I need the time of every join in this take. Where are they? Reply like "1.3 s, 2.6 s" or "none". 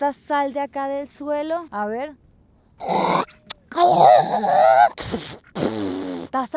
1.7 s